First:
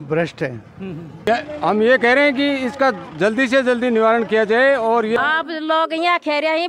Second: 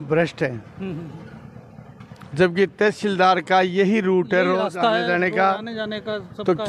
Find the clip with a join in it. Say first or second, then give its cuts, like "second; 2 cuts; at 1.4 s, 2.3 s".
first; 2 cuts; at 1.3 s, 5.2 s